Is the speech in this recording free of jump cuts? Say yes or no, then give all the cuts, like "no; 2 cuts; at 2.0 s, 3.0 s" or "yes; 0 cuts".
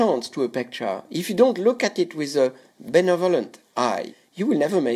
no; 2 cuts; at 2.7 s, 4.1 s